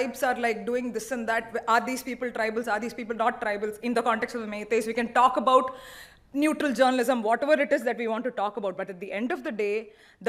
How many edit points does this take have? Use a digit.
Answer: 0